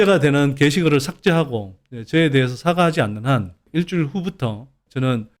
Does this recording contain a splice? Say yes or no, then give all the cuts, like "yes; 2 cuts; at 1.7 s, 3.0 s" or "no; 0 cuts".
no; 0 cuts